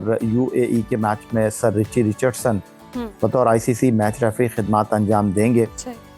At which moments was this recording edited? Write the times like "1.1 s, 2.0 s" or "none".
none